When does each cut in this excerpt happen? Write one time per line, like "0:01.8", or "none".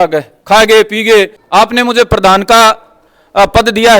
0:01.4

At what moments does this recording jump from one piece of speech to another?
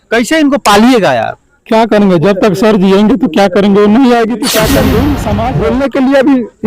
0:05.5

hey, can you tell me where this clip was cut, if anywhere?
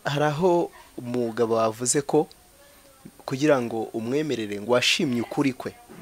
none

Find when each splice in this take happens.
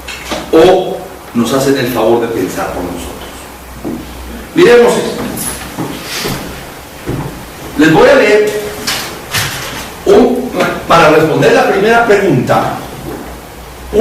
none

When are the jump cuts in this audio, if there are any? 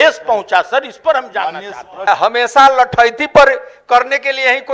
0:02.1

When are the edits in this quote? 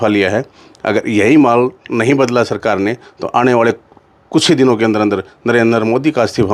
none

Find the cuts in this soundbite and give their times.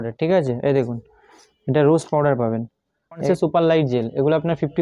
0:03.2

